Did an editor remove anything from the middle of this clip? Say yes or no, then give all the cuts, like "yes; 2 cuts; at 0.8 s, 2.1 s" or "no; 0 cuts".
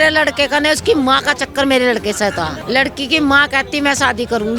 yes; 1 cut; at 2.6 s